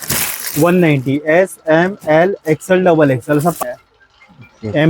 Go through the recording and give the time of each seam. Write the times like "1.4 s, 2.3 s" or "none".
3.6 s